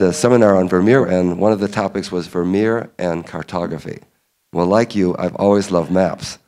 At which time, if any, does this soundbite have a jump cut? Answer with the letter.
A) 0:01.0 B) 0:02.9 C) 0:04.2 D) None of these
A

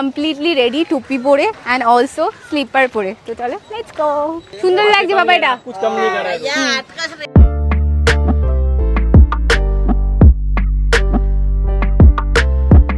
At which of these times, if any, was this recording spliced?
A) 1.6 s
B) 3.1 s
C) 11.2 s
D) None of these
D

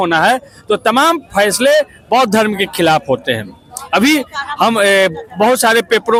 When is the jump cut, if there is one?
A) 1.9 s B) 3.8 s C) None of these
C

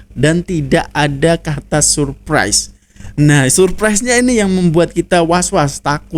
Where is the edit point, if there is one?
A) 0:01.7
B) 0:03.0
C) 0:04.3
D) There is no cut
D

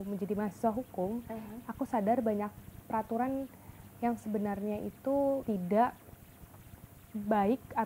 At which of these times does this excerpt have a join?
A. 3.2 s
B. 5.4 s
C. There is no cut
B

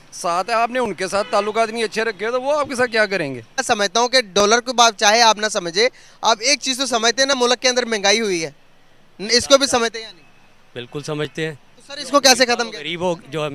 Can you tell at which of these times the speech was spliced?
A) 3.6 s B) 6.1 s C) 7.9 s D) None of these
A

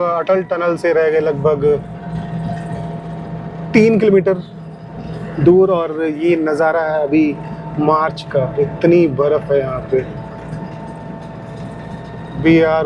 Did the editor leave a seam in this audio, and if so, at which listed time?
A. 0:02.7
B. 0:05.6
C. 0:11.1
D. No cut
D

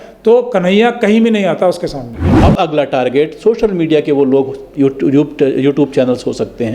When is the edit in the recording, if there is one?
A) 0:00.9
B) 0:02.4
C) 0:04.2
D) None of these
B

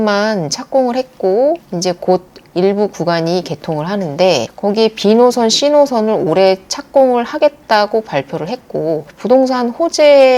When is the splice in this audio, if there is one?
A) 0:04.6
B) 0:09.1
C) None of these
B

